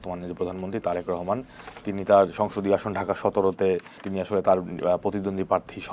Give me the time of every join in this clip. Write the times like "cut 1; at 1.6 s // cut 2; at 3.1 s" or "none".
cut 1; at 4.1 s